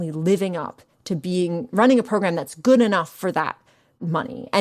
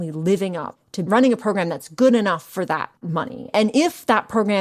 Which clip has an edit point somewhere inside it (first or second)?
second